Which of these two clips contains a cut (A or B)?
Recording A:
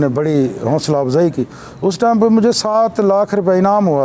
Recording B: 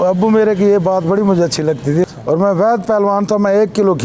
B